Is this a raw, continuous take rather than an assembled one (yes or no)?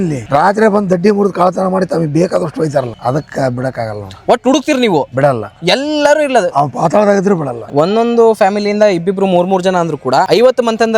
no